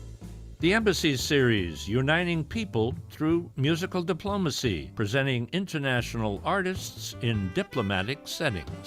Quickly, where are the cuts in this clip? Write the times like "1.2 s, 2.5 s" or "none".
4.9 s